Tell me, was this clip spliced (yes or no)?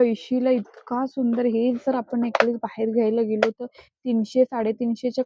no